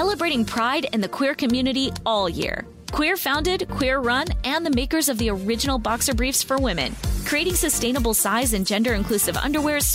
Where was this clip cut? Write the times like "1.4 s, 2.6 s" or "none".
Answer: none

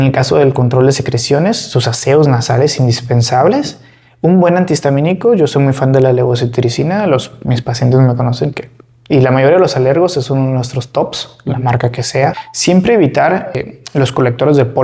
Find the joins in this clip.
12.4 s, 13.6 s

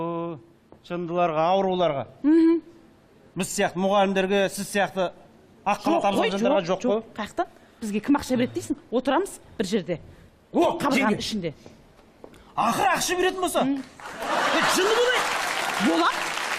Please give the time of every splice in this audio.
1.3 s

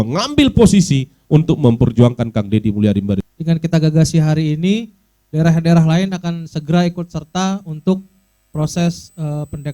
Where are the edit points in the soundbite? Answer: 3.3 s

